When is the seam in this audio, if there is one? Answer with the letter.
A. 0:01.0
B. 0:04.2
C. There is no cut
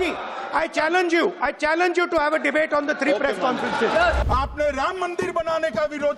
B